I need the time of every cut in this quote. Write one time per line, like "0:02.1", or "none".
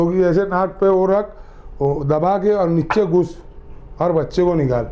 none